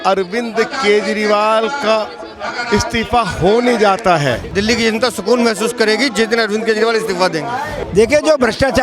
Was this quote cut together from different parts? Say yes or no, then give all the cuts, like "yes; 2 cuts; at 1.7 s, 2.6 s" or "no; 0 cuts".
yes; 2 cuts; at 4.5 s, 7.8 s